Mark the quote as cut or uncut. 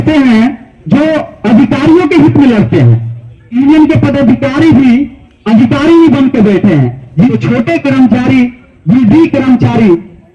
cut